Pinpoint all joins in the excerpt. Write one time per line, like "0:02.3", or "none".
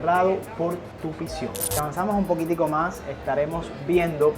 0:01.7